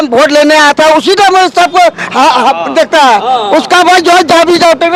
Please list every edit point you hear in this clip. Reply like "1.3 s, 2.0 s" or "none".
none